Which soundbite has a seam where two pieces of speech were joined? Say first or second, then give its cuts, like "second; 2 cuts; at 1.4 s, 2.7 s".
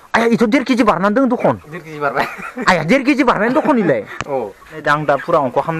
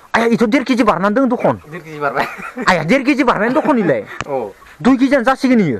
first; 1 cut; at 4.7 s